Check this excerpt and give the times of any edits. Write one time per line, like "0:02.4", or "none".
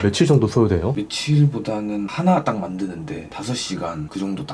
0:01.0